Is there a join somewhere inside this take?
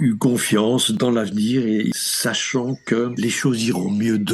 yes; 3 cuts; at 1.0 s, 1.9 s, 3.1 s

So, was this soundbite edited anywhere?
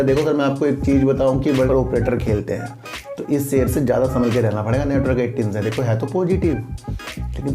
yes; 1 cut; at 1.7 s

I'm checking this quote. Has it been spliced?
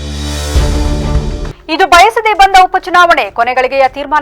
yes; 1 cut; at 1.5 s

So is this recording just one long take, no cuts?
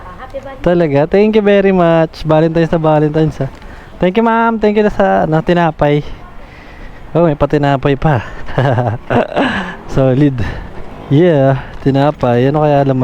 yes; 0 cuts

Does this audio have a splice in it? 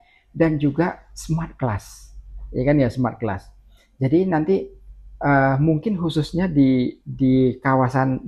no; 0 cuts

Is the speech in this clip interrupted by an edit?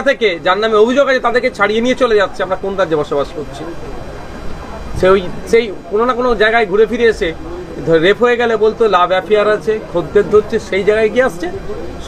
no; 0 cuts

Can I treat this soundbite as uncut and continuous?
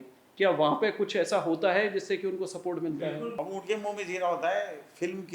no; 1 cut; at 3.2 s

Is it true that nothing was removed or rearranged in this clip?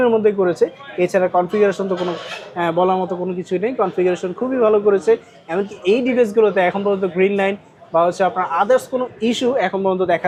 yes; 0 cuts

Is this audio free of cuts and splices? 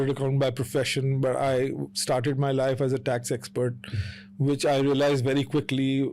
yes; 0 cuts

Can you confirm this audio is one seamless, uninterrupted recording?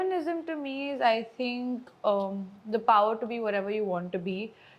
yes; 0 cuts

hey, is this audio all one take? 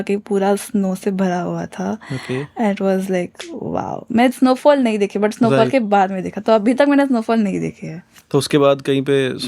yes; 0 cuts

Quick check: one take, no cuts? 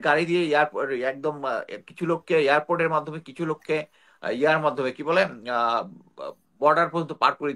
yes; 0 cuts

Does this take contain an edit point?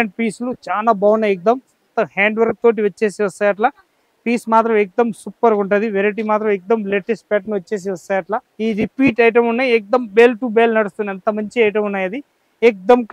yes; 2 cuts; at 1.8 s, 8.5 s

